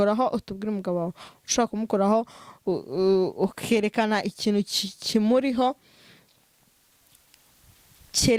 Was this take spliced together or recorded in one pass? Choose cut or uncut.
uncut